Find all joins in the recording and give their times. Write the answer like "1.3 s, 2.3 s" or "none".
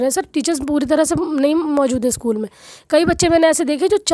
none